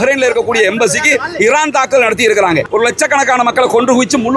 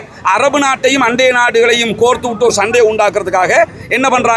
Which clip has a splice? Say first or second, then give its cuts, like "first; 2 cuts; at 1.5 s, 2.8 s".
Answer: first; 1 cut; at 2.7 s